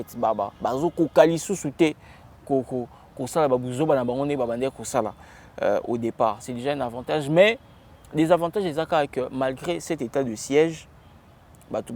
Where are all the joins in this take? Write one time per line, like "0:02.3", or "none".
none